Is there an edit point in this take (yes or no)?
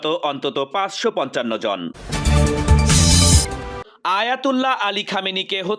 yes